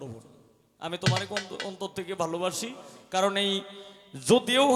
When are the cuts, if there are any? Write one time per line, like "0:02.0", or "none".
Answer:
none